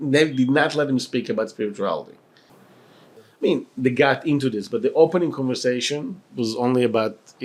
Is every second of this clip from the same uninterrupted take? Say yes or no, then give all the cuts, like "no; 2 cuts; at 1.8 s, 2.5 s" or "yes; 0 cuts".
yes; 0 cuts